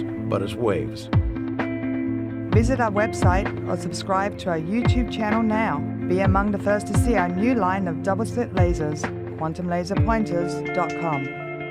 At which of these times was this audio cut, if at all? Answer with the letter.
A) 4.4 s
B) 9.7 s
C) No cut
B